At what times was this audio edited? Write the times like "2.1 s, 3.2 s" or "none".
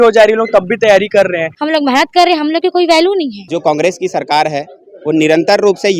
1.5 s, 3.4 s